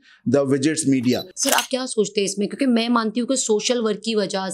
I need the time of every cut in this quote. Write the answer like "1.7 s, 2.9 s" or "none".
1.3 s